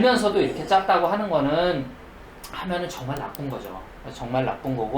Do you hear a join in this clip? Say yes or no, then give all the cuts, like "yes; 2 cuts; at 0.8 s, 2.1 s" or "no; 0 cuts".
no; 0 cuts